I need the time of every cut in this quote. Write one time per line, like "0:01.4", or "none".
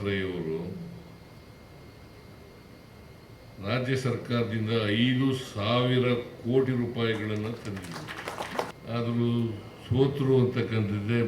0:08.7